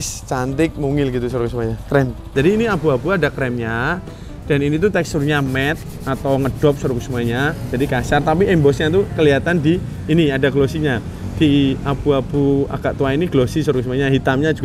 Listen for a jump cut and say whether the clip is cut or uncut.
cut